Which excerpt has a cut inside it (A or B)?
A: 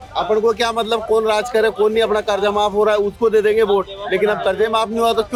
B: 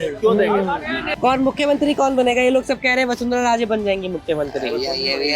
B